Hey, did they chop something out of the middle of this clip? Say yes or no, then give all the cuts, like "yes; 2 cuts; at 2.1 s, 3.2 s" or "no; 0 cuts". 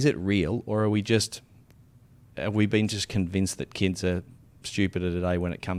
no; 0 cuts